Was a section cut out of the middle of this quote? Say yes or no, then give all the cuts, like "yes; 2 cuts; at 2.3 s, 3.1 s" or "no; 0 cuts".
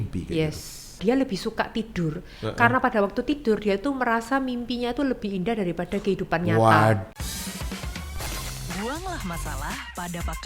yes; 2 cuts; at 1.0 s, 7.1 s